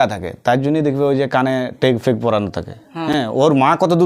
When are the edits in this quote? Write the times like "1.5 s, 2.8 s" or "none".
none